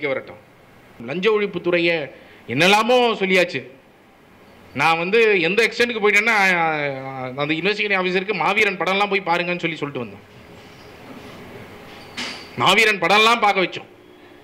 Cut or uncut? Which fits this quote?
cut